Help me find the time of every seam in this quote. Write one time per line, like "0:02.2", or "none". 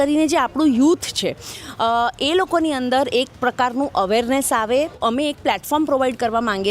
0:05.0